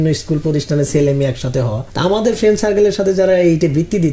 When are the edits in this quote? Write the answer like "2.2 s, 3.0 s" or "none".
1.8 s